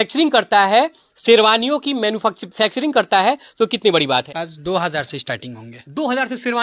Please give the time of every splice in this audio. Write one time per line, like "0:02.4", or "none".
0:04.4